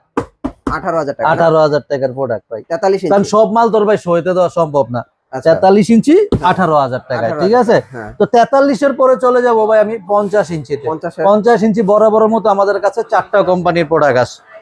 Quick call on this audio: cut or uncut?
uncut